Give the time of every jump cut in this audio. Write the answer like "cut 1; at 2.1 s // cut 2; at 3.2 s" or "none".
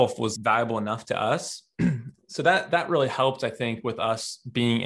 cut 1; at 2.1 s